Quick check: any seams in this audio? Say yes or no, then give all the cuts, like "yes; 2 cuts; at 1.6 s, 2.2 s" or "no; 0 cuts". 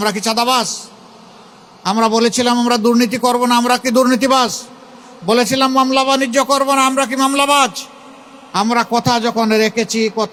no; 0 cuts